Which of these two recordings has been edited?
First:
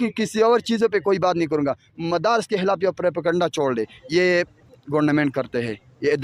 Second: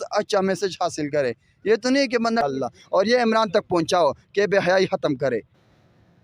second; 1 cut; at 2.4 s

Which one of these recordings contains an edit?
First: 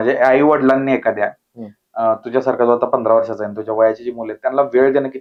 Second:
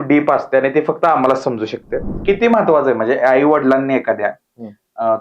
second; 1 cut; at 2.1 s

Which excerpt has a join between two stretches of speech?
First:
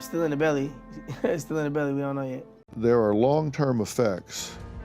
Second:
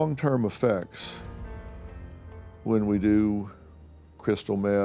first; 1 cut; at 2.5 s

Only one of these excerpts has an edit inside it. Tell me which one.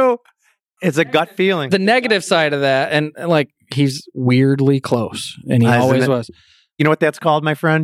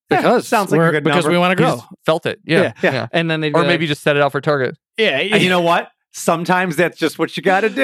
first; 1 cut; at 6.8 s

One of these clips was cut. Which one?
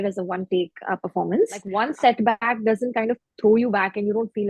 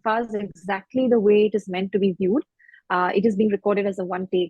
first; 1 cut; at 1.7 s

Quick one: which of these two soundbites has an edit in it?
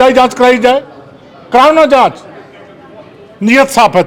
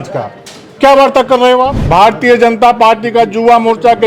second; 1 cut; at 1.8 s

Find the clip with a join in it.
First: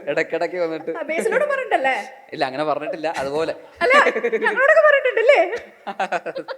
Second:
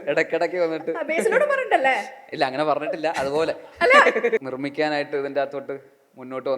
second; 1 cut; at 4.4 s

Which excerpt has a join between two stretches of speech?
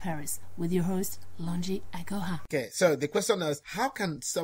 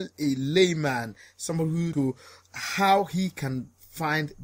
second; 1 cut; at 1.9 s

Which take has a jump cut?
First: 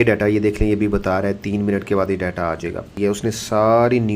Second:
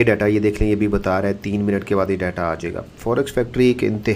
first; 1 cut; at 2.9 s

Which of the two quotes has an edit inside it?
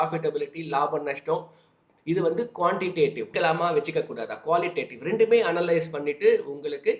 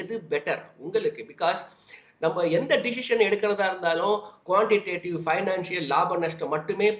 first; 1 cut; at 3.3 s

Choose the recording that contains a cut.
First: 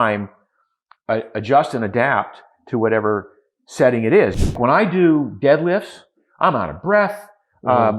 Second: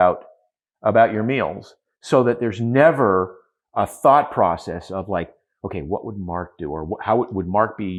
first; 1 cut; at 4.4 s

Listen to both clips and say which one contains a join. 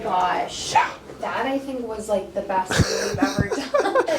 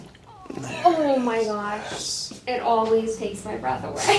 first; 1 cut; at 1.1 s

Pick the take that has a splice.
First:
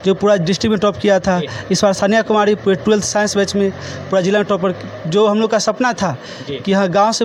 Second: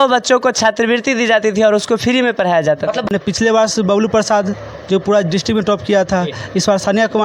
second; 1 cut; at 3.0 s

